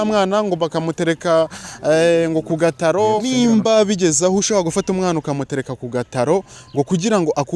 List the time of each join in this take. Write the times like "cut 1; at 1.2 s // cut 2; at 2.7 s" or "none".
cut 1; at 3.2 s

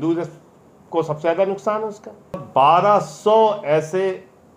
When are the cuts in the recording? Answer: cut 1; at 2.4 s

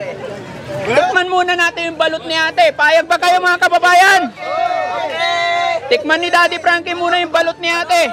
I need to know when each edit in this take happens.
none

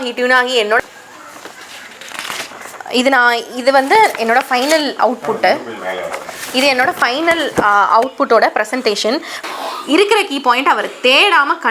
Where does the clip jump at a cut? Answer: cut 1; at 0.9 s // cut 2; at 9.4 s

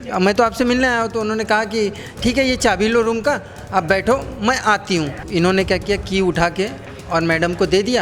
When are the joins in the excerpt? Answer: cut 1; at 5.2 s

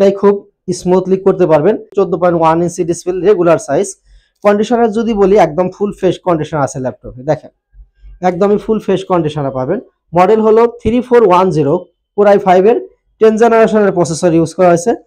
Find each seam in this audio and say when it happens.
cut 1; at 1.9 s

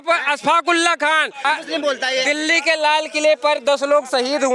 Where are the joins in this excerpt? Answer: cut 1; at 1.5 s

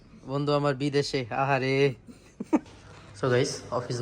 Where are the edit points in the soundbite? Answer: cut 1; at 2.6 s

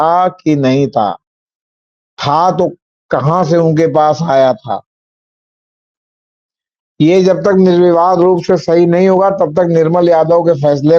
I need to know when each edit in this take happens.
none

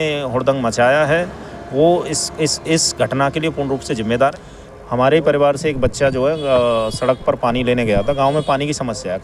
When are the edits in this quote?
cut 1; at 4.3 s

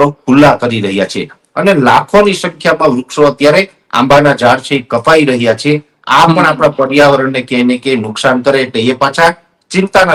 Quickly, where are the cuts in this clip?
none

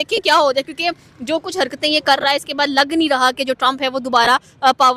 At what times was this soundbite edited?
none

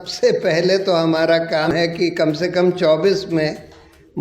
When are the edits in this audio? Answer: cut 1; at 1.7 s

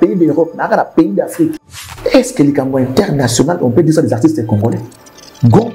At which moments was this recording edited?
cut 1; at 1.5 s

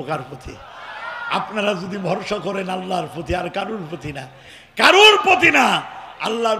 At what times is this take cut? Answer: none

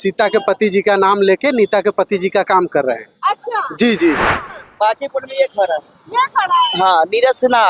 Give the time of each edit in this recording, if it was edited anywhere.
cut 1; at 4.4 s

